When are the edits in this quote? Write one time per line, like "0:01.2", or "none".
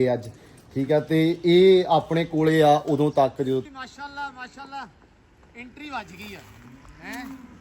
0:03.6